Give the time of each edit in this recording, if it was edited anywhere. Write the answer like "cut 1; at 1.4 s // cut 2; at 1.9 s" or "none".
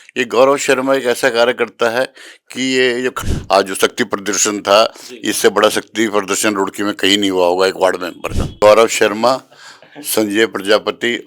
cut 1; at 3.2 s // cut 2; at 8.4 s

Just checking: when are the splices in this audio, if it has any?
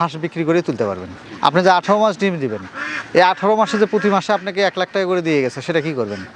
cut 1; at 1.1 s

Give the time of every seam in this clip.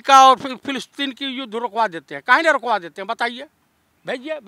none

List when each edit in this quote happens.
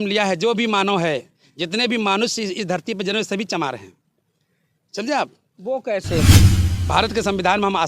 cut 1; at 6.4 s

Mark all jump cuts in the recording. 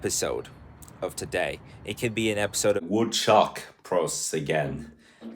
cut 1; at 2.8 s

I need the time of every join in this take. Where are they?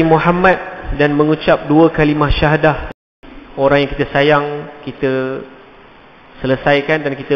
cut 1; at 3.0 s

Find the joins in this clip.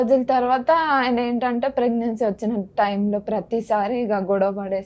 none

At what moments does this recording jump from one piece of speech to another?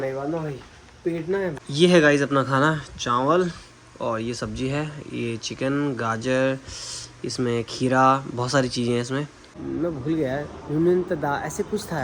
cut 1; at 1.6 s // cut 2; at 9.4 s

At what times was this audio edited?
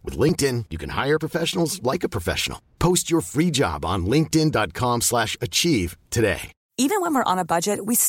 cut 1; at 6.6 s

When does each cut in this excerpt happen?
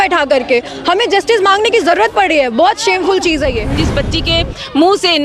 cut 1; at 3.8 s

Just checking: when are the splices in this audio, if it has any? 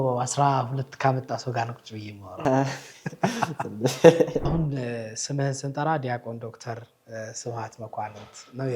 cut 1; at 4.5 s

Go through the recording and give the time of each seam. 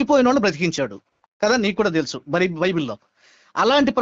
none

